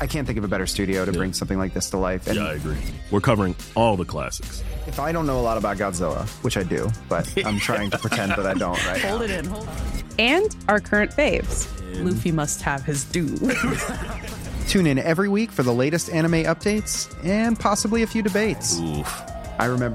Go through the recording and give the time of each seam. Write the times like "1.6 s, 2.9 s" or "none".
none